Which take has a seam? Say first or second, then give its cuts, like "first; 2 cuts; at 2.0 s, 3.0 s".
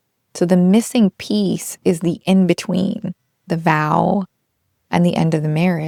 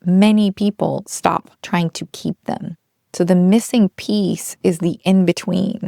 second; 1 cut; at 1.5 s